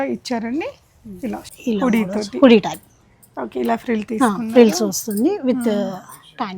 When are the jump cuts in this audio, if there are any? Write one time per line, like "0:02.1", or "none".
0:01.4